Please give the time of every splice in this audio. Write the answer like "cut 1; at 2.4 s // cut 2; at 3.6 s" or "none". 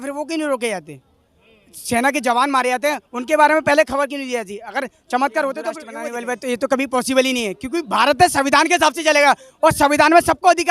cut 1; at 5.9 s

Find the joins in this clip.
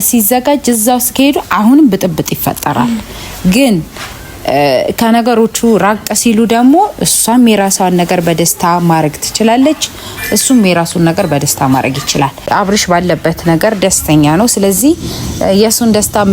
cut 1; at 12.4 s

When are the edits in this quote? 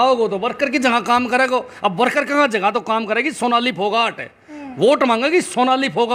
none

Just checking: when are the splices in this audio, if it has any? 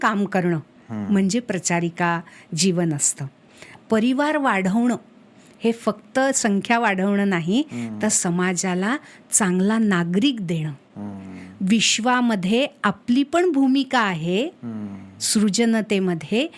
cut 1; at 3.7 s

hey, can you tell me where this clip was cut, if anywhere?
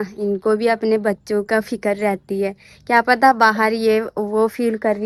none

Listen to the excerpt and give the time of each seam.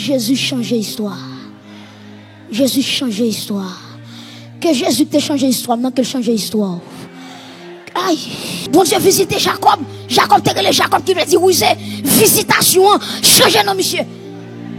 cut 1; at 8.6 s

